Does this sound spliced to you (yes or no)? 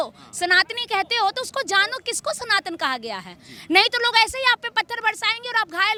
no